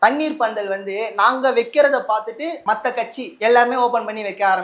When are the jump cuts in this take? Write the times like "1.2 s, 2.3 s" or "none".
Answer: 3.2 s